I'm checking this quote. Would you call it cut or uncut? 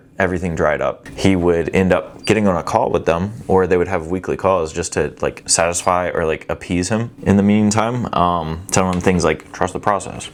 uncut